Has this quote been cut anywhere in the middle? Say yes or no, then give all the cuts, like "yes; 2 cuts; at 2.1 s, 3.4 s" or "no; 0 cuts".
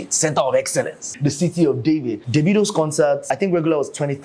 yes; 3 cuts; at 1.1 s, 2.2 s, 3.3 s